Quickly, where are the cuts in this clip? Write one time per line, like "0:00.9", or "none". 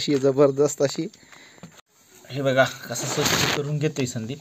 0:01.9